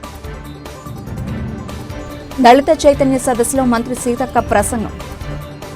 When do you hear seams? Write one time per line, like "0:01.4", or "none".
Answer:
none